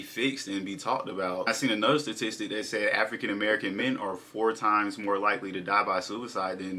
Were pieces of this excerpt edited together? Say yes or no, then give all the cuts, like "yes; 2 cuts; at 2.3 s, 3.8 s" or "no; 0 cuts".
yes; 1 cut; at 1.4 s